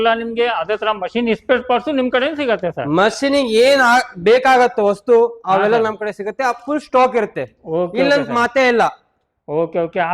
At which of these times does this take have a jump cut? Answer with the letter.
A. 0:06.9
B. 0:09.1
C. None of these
C